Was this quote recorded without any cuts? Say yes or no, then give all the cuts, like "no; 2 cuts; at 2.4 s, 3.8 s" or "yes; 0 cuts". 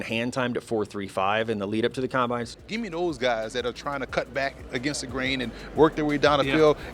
no; 1 cut; at 2.5 s